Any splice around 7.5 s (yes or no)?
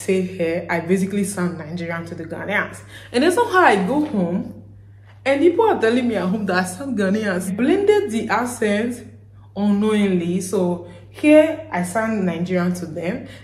yes